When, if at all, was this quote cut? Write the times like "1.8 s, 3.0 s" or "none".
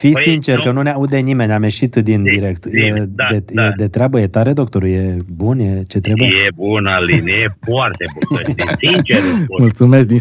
none